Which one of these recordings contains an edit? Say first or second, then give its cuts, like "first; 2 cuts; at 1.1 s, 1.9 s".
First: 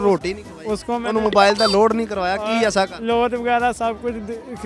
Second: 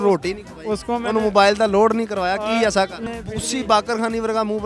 second; 1 cut; at 3.0 s